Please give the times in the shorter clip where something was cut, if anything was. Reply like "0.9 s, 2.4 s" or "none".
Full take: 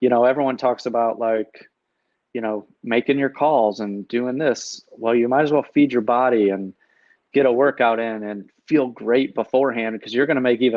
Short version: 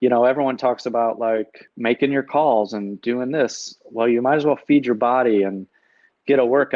1.6 s